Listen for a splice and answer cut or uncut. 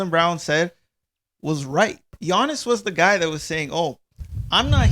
cut